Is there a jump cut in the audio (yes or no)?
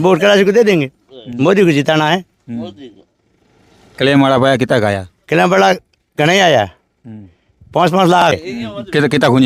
no